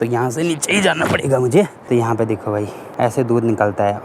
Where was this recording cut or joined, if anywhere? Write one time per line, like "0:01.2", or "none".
0:01.8
0:02.8

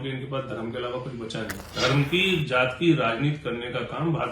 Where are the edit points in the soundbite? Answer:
0:01.7

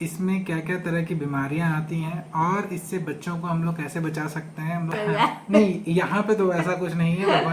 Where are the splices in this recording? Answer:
0:04.9

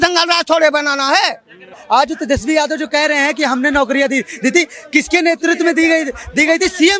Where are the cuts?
0:01.8

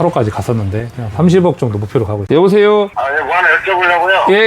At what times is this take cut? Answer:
0:02.2

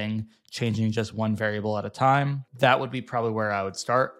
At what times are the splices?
0:02.4

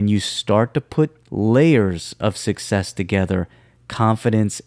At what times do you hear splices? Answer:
0:01.2

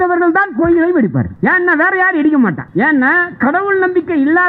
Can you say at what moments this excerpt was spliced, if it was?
0:01.3
0:02.6

